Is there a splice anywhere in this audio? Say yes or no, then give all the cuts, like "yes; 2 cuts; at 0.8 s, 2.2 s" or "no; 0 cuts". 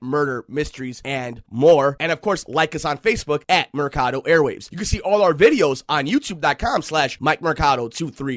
no; 0 cuts